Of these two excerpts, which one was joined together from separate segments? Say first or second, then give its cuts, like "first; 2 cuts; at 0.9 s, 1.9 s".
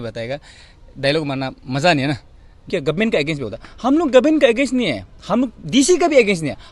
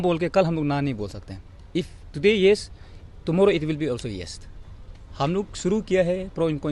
first; 1 cut; at 2.6 s